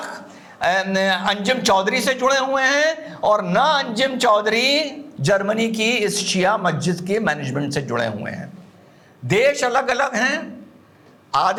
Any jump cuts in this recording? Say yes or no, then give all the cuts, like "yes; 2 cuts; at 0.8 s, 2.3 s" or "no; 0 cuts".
no; 0 cuts